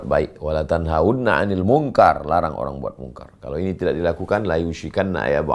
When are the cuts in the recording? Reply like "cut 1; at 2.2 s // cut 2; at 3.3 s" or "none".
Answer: none